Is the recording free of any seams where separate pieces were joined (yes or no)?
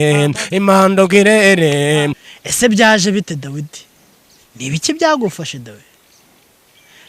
no